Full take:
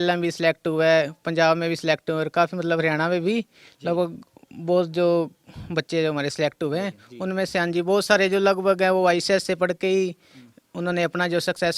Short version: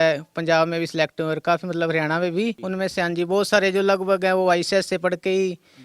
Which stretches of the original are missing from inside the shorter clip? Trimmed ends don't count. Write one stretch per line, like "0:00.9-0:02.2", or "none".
0:03.5-0:07.2